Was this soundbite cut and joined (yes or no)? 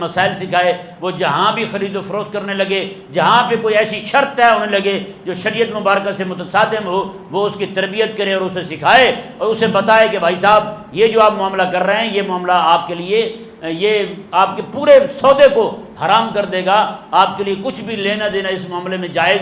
no